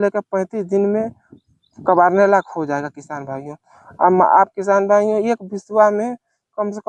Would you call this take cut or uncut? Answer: uncut